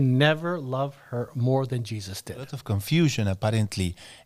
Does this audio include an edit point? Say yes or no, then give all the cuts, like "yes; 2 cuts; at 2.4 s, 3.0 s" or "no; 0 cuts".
yes; 1 cut; at 2.6 s